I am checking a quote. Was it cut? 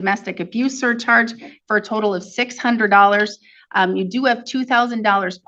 no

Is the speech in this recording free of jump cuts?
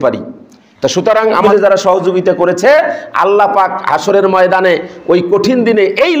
no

